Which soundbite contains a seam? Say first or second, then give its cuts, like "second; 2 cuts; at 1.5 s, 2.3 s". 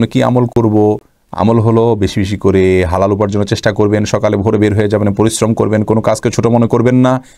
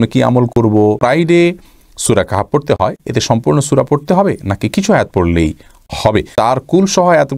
second; 2 cuts; at 1.0 s, 6.3 s